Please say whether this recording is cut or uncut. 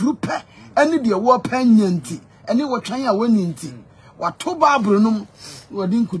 uncut